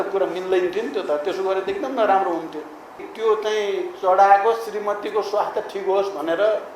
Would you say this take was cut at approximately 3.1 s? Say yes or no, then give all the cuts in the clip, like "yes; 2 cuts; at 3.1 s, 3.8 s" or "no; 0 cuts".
yes; 1 cut; at 3.1 s